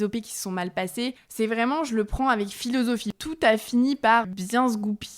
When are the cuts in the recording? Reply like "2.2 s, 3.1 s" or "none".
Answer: 1.2 s, 3.1 s, 4.3 s